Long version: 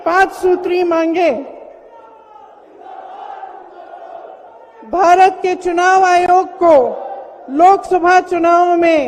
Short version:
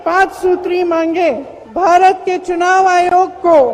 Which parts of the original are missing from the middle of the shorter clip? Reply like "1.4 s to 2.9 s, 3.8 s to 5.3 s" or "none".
1.6 s to 4.7 s